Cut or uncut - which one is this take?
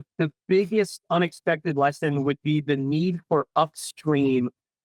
uncut